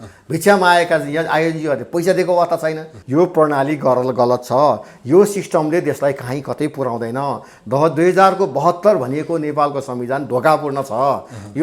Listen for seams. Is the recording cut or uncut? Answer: cut